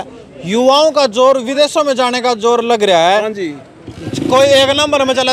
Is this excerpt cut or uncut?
uncut